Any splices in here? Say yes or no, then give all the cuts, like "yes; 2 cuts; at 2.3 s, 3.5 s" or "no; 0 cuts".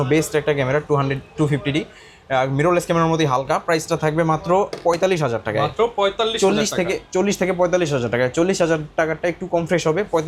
no; 0 cuts